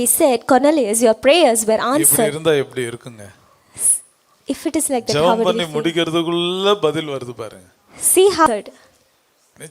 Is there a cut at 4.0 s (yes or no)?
no